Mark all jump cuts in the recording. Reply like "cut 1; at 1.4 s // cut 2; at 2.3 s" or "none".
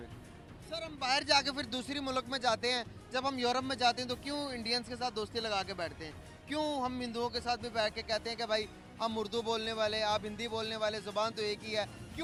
none